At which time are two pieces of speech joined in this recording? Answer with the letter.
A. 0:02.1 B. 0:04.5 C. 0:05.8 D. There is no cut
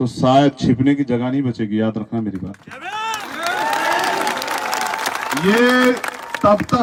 D